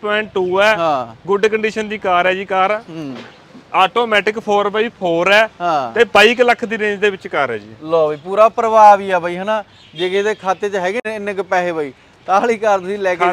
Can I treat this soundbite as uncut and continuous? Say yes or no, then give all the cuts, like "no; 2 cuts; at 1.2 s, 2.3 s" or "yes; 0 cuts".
no; 1 cut; at 11.0 s